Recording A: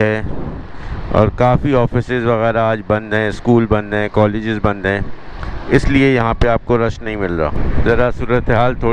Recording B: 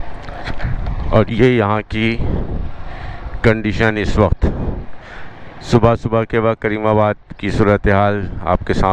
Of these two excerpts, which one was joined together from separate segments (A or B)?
A